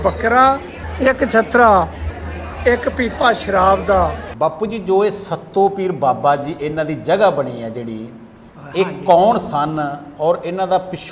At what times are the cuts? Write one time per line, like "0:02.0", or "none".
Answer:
0:04.2